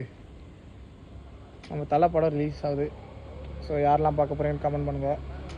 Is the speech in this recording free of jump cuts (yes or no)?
yes